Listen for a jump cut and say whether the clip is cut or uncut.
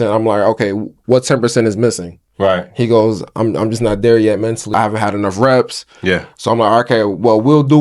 cut